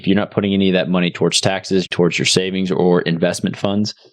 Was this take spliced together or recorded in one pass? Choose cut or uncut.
cut